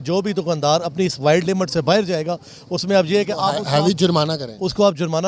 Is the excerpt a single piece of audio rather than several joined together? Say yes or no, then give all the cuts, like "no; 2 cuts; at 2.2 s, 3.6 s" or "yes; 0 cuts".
yes; 0 cuts